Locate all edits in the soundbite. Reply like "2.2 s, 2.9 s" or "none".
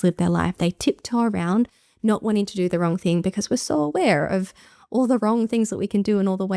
none